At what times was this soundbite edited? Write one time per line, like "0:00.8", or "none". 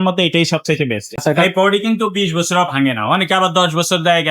0:01.1

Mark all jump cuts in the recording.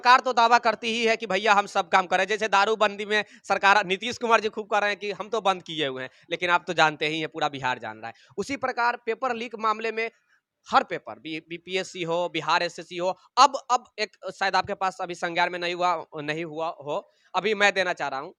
none

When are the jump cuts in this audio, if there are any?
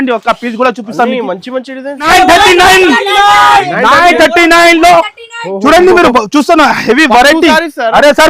0:02.1

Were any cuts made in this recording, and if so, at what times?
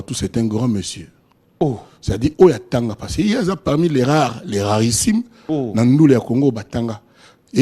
none

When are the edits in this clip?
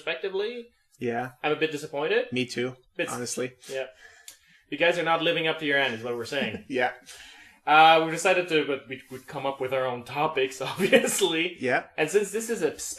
0:06.6

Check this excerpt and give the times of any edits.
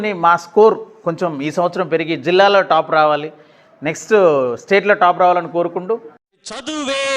0:06.1

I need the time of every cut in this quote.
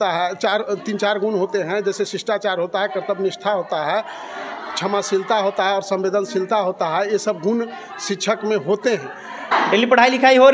0:09.5

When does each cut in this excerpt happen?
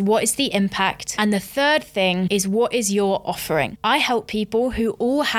0:01.0
0:02.3
0:03.7

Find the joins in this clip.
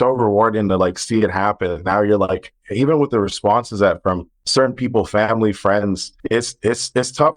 0:04.3
0:06.1

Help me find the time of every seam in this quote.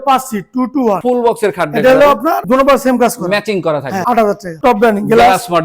0:01.0
0:04.5

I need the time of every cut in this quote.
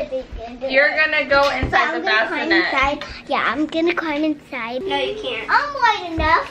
0:04.8

